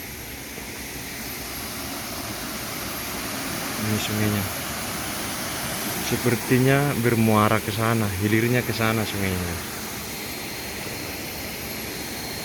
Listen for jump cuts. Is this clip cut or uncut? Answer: uncut